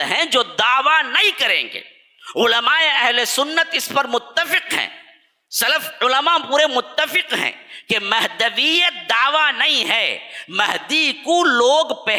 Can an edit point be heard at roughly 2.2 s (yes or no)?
no